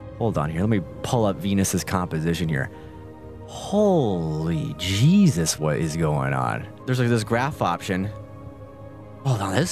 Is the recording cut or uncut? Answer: uncut